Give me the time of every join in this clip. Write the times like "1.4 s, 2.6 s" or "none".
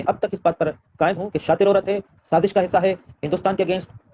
none